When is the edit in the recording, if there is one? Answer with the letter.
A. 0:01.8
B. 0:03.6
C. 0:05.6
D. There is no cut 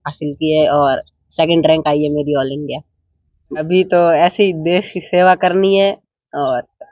B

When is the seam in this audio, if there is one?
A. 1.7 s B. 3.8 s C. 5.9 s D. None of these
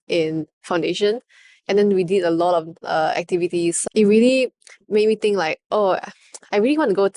B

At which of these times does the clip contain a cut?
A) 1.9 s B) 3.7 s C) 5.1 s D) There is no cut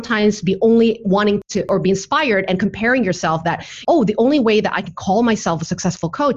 B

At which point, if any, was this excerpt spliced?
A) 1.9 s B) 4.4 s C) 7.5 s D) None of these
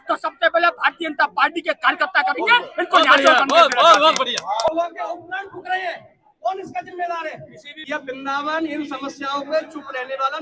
B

